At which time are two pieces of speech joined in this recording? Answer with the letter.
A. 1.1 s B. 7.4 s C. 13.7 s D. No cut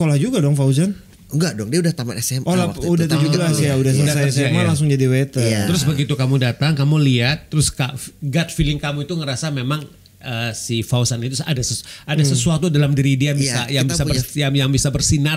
A